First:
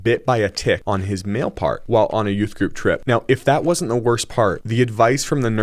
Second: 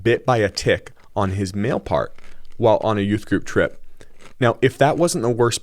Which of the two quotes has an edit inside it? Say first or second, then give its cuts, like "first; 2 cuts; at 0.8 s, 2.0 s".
first; 4 cuts; at 0.8 s, 1.8 s, 3.0 s, 4.6 s